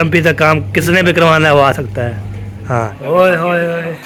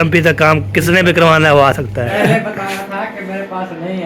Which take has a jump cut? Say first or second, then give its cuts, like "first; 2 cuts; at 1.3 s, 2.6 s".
second; 1 cut; at 2.1 s